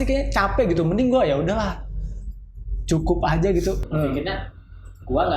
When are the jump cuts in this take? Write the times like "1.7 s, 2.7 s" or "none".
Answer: 3.8 s